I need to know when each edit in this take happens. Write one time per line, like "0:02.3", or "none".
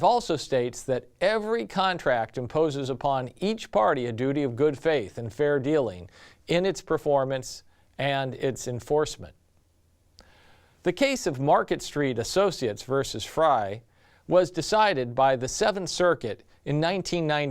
0:02.1